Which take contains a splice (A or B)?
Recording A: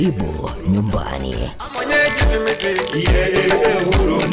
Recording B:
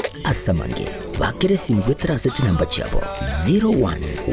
A